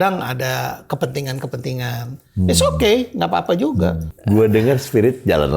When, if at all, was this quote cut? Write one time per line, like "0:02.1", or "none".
0:04.1

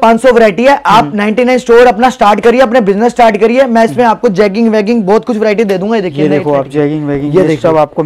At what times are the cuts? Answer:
none

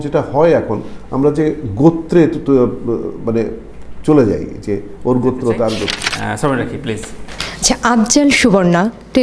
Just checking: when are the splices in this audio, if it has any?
0:06.2

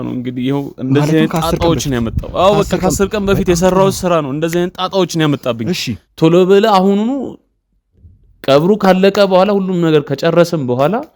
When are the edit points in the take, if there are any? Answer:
0:06.0

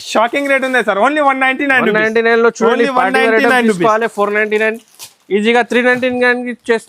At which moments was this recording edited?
none

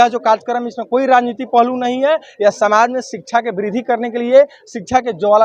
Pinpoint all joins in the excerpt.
none

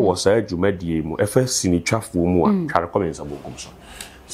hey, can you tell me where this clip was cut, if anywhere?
none

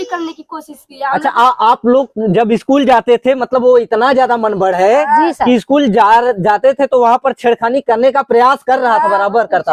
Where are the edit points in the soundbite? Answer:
none

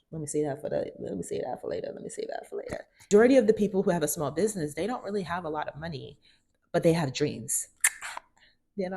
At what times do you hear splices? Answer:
0:03.1

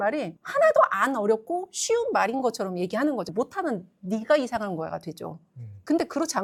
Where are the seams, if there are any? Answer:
none

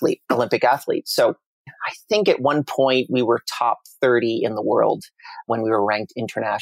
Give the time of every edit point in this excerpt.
0:01.6
0:05.5

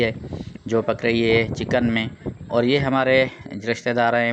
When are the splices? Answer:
none

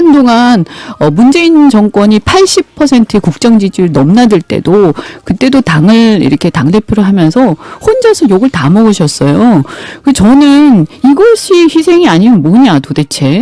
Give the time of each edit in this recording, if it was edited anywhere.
none

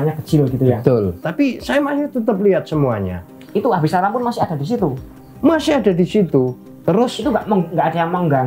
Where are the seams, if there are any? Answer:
0:01.2
0:06.7

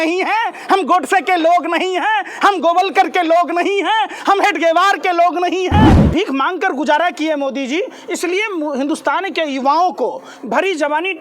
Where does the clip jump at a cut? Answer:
0:06.0

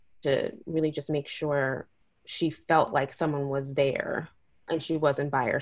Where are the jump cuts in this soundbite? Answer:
0:04.6

